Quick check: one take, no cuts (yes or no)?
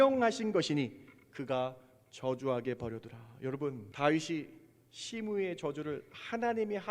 no